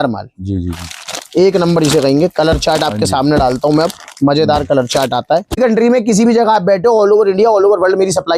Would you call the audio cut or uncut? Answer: cut